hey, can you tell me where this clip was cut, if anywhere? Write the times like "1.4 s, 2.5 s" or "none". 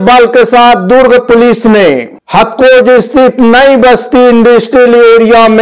none